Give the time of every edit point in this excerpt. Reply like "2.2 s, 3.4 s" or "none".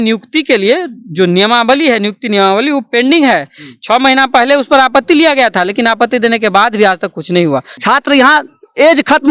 7.7 s